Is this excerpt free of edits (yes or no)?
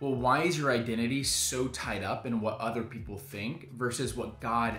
yes